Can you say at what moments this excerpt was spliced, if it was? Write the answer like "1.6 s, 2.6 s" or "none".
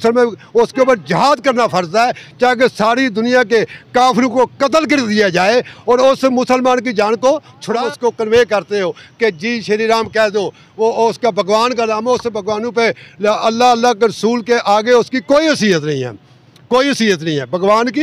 7.8 s